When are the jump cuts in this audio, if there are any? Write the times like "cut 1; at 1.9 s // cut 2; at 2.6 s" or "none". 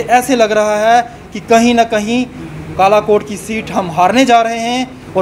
none